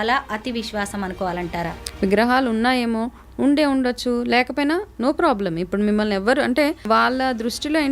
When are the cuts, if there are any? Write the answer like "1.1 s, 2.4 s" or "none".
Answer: 1.8 s, 6.8 s